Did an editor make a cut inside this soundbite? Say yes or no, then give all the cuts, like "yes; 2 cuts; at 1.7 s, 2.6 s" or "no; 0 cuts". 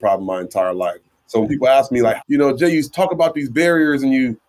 yes; 1 cut; at 2.2 s